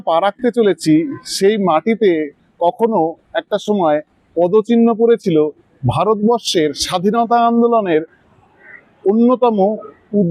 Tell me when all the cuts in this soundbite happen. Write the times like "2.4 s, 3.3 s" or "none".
none